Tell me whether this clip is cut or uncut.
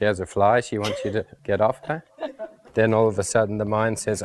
cut